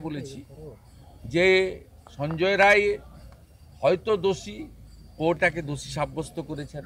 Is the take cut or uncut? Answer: uncut